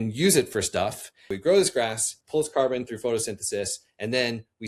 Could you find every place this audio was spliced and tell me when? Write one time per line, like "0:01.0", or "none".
0:01.4